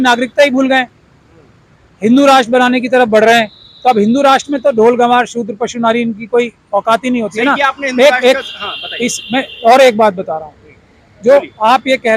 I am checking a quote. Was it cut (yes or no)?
no